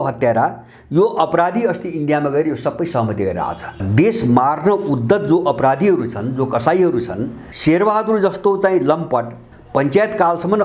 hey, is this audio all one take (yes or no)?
no